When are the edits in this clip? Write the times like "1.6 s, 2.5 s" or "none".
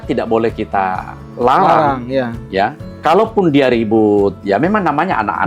2.9 s

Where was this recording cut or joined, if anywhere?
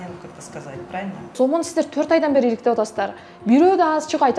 1.3 s

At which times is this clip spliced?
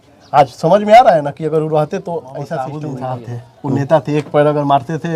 2.8 s

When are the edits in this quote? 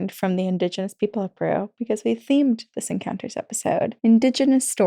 3.9 s

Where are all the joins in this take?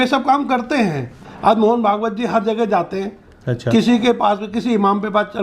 1.2 s

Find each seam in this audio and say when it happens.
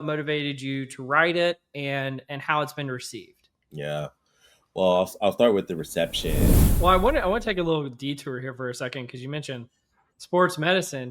6.7 s

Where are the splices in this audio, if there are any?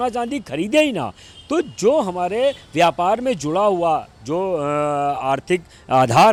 none

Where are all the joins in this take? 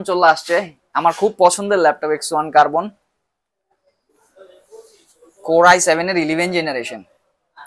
none

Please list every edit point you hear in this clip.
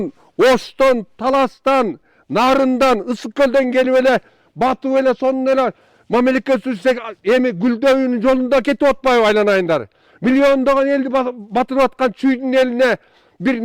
none

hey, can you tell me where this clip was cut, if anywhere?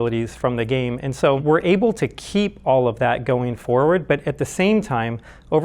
1.4 s

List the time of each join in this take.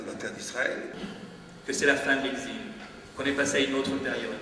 1.0 s

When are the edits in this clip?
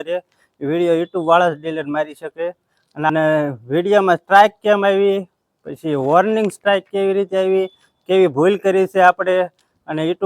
3.1 s

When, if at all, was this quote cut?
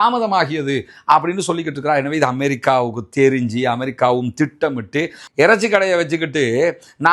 5.2 s

